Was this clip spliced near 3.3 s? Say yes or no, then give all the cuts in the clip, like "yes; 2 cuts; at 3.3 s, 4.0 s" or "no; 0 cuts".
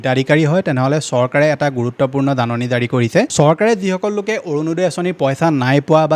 yes; 1 cut; at 3.3 s